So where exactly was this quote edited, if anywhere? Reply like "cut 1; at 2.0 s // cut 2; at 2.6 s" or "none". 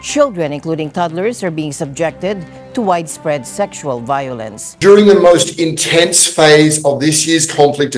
cut 1; at 4.7 s